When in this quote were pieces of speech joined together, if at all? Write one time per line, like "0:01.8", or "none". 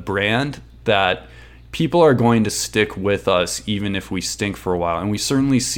none